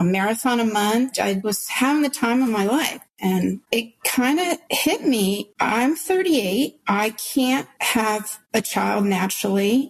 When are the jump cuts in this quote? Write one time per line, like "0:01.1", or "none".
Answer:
0:03.1
0:05.5